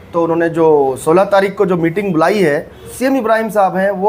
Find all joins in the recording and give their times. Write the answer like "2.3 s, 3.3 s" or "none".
2.9 s